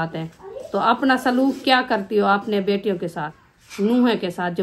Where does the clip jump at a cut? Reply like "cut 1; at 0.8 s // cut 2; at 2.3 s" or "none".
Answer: none